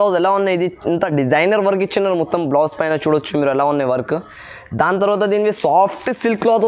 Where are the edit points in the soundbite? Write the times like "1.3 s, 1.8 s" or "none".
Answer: none